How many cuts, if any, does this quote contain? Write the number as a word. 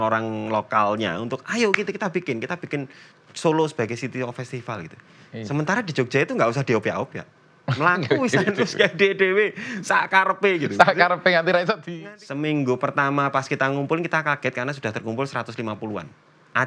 one